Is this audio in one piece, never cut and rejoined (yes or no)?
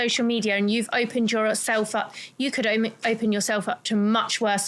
yes